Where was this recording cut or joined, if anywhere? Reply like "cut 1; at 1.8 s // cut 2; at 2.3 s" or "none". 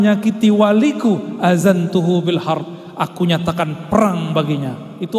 none